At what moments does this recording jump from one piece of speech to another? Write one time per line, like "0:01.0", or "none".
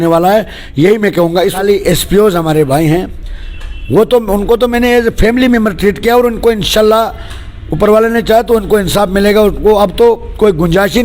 0:01.6